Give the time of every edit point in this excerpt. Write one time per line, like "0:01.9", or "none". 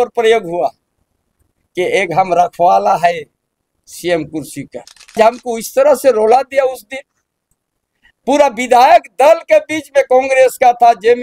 0:05.1